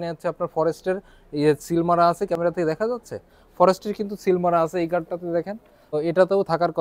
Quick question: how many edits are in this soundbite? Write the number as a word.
zero